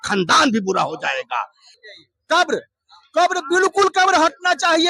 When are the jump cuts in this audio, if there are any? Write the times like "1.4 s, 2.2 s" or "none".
1.6 s